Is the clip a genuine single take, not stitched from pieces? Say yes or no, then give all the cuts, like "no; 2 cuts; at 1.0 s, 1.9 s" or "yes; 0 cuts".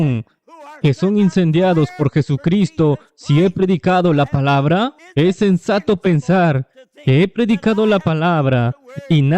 no; 1 cut; at 5.0 s